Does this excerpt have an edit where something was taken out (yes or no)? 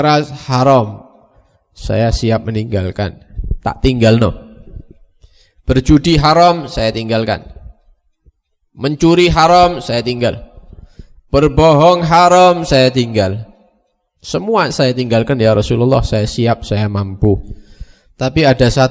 no